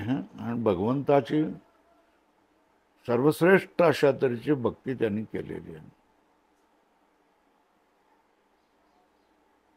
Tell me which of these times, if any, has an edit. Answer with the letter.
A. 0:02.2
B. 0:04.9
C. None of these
C